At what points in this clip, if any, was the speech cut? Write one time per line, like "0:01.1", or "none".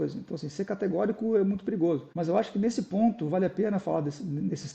0:02.1